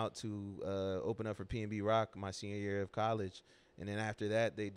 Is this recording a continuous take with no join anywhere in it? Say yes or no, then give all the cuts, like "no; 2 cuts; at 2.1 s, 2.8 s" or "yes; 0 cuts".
yes; 0 cuts